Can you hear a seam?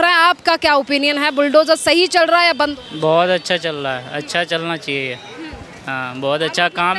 no; 0 cuts

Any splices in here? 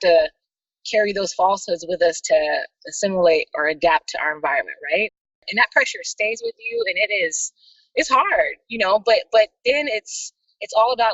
yes; 1 cut; at 5.4 s

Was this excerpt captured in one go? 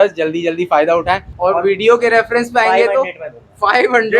no; 1 cut; at 1.3 s

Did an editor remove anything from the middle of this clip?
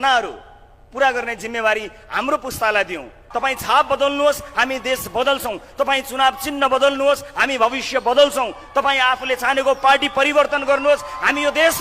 yes; 1 cut; at 3.2 s

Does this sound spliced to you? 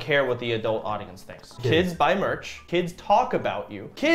yes; 2 cuts; at 1.4 s, 2.5 s

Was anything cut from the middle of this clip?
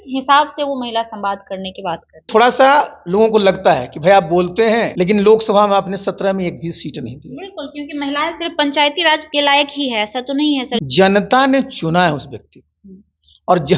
yes; 4 cuts; at 2.3 s, 4.9 s, 9.3 s, 10.8 s

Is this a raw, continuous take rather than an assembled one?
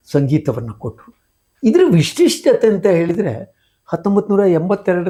yes; 0 cuts

